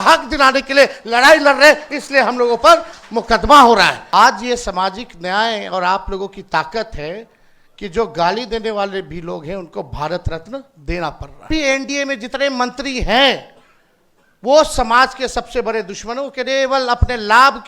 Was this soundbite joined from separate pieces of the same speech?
yes; 2 cuts; at 4.0 s, 11.5 s

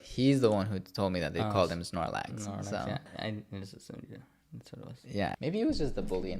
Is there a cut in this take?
yes; 2 cuts; at 3.1 s, 5.4 s

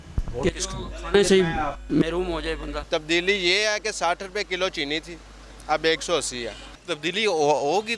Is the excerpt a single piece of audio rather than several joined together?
no; 2 cuts; at 2.8 s, 6.8 s

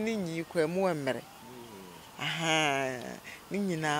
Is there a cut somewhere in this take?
no; 0 cuts

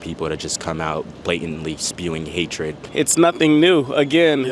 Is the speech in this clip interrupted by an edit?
yes; 1 cut; at 2.8 s

